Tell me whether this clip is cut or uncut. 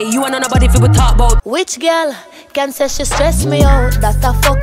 cut